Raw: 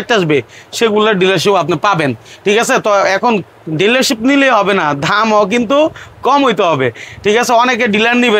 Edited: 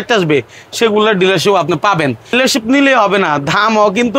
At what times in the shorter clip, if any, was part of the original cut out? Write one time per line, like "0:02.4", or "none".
0:02.3